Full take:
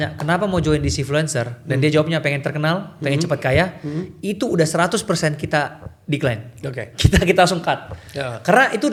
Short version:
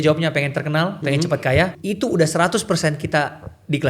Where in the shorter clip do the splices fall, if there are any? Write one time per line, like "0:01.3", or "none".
0:01.0
0:01.8